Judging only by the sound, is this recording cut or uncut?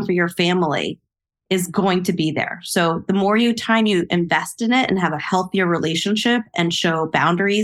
uncut